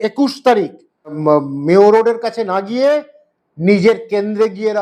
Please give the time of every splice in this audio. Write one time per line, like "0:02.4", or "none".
0:01.2